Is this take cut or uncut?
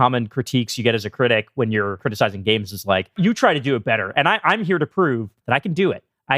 cut